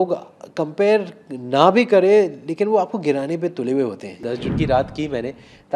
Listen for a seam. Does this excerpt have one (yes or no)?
yes